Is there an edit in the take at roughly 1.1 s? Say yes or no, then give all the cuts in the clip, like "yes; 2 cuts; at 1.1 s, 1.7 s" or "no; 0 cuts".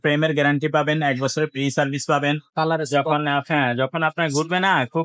no; 1 cut; at 2.4 s